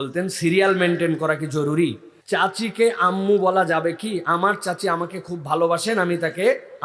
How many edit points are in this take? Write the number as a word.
one